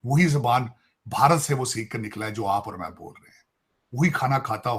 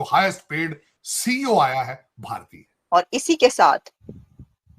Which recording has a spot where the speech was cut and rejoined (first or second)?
second